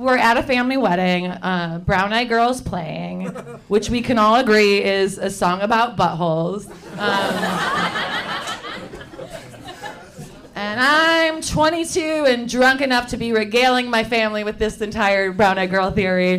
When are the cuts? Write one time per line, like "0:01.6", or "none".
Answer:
none